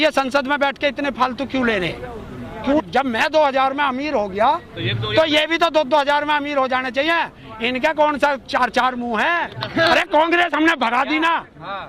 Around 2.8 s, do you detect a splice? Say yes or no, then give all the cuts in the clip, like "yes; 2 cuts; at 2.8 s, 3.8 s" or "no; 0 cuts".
yes; 2 cuts; at 2.8 s, 9.9 s